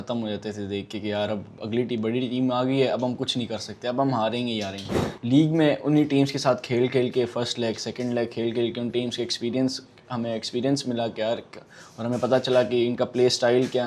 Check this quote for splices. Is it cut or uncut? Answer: uncut